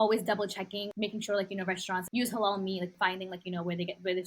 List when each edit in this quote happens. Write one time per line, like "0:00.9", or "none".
0:00.9
0:02.1
0:02.9